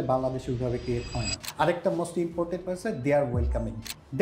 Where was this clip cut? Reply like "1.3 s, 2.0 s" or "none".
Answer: 1.4 s